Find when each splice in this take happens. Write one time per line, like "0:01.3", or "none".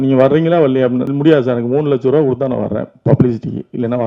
0:01.1